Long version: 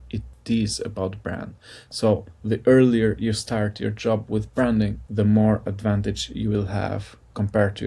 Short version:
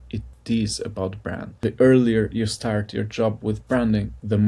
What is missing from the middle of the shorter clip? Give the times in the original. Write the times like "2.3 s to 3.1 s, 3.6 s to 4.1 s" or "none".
1.5 s to 2.4 s